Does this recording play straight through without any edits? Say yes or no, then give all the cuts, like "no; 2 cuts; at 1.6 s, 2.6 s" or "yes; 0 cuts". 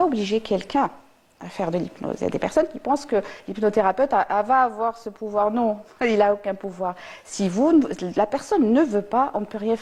yes; 0 cuts